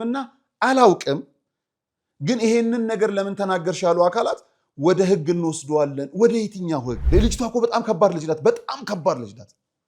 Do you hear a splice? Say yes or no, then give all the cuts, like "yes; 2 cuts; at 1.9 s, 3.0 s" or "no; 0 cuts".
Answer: yes; 1 cut; at 7.0 s